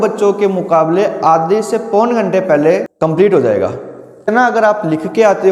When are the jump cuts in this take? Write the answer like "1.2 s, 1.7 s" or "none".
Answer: 2.9 s, 4.3 s